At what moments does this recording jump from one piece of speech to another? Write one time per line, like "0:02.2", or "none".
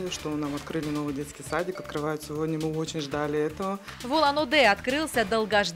0:03.9